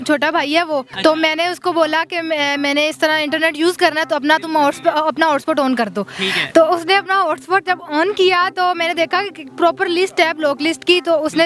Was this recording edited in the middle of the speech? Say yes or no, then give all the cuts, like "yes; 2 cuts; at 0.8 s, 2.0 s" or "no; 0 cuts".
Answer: yes; 1 cut; at 0.9 s